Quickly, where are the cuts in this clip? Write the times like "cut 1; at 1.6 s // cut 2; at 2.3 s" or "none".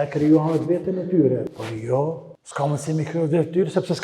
cut 1; at 1.5 s // cut 2; at 2.4 s